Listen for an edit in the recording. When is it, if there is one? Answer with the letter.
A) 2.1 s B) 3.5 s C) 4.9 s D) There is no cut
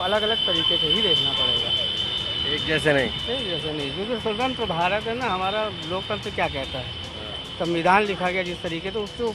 D